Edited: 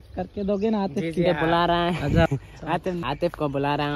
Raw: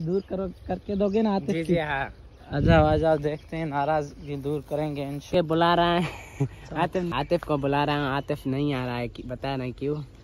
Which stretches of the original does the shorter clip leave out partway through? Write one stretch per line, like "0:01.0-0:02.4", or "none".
0:01.8-0:05.4